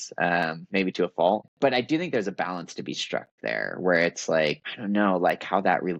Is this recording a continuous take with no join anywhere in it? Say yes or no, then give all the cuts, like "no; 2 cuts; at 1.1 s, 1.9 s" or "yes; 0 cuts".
no; 2 cuts; at 1.5 s, 4.7 s